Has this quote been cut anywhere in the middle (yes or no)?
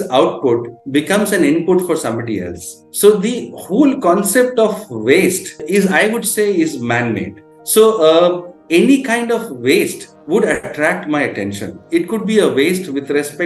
yes